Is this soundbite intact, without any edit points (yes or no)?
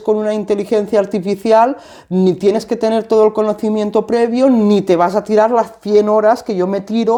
yes